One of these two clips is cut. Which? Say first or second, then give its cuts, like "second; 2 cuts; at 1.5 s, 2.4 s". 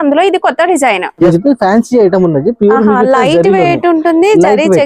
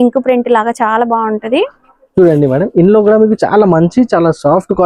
first; 1 cut; at 1.3 s